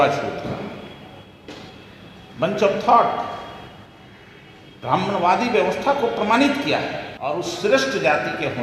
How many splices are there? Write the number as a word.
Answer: one